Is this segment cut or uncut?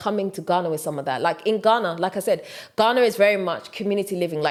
uncut